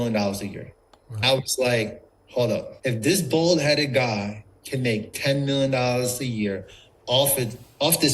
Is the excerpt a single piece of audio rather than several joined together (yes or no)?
no